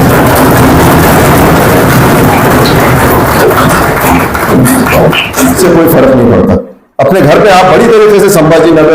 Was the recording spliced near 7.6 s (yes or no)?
no